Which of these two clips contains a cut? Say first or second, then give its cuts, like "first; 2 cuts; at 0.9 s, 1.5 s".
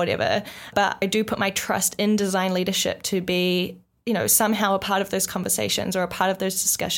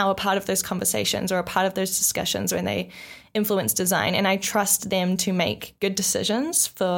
first; 1 cut; at 1.0 s